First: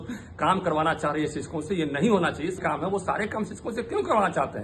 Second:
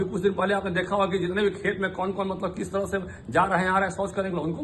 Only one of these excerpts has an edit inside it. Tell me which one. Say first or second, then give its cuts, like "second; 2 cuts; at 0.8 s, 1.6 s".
first; 1 cut; at 2.6 s